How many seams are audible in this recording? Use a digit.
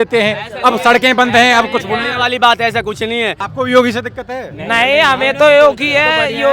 1